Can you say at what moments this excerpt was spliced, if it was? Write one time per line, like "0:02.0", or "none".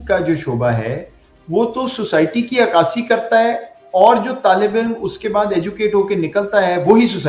none